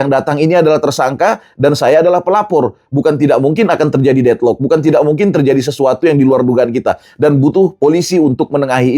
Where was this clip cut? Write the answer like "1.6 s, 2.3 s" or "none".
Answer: none